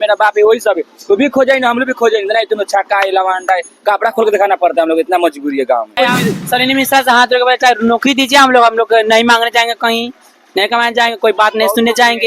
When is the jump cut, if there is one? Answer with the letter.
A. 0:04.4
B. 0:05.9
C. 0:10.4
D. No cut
B